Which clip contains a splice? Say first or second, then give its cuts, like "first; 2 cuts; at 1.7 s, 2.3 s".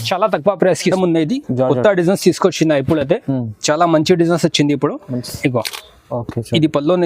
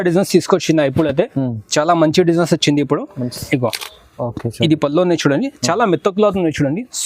first; 1 cut; at 0.9 s